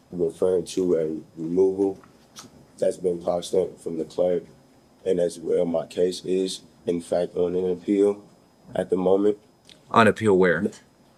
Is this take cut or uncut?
uncut